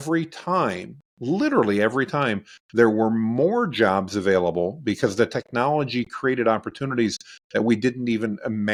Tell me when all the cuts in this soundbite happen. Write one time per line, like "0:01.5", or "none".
none